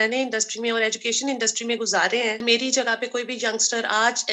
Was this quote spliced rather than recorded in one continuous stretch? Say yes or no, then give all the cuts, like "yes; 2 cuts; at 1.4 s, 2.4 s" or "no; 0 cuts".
yes; 1 cut; at 2.4 s